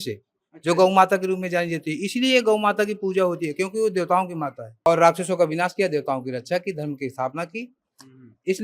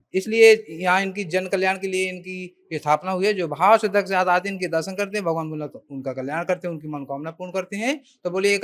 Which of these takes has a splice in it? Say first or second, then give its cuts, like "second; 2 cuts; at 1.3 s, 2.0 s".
first; 1 cut; at 4.9 s